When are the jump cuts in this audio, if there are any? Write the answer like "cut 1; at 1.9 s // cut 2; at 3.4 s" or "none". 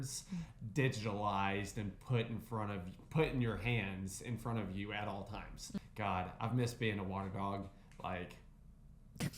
cut 1; at 5.8 s